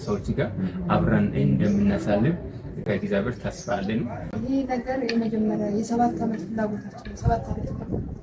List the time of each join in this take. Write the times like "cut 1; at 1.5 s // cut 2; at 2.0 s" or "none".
cut 1; at 2.8 s // cut 2; at 4.3 s